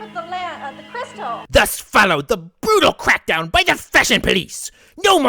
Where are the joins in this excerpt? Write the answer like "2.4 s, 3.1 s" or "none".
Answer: 1.3 s